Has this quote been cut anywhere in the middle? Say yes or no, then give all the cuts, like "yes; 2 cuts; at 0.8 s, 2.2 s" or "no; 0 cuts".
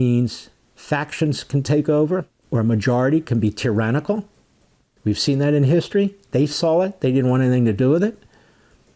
no; 0 cuts